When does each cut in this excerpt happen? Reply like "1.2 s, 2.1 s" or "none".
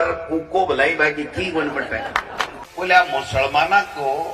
2.1 s